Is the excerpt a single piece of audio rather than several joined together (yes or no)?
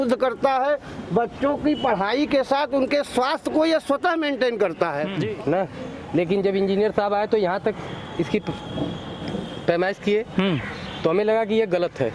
no